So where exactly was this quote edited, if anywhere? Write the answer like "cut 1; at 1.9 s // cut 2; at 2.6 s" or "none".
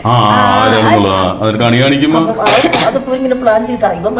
none